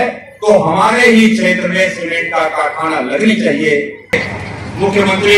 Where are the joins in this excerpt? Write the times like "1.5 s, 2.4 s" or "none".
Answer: 4.1 s